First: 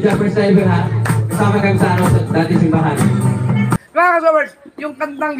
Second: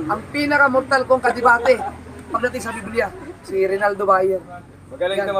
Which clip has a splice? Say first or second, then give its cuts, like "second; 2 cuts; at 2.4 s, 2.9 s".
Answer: first; 1 cut; at 3.7 s